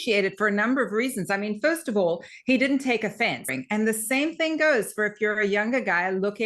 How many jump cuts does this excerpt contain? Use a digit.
1